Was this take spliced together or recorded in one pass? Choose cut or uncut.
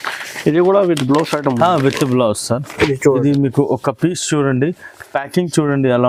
uncut